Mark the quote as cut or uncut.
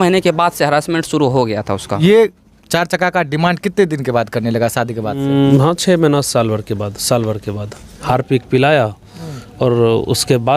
cut